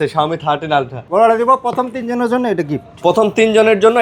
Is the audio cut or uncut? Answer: cut